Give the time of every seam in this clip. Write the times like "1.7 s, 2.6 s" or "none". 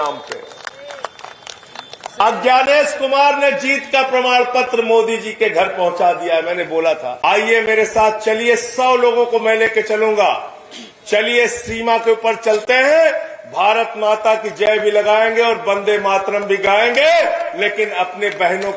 7.2 s